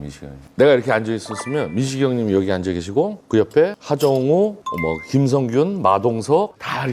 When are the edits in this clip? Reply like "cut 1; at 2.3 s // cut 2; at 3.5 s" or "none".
none